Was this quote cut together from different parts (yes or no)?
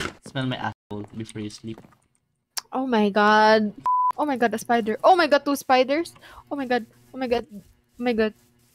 yes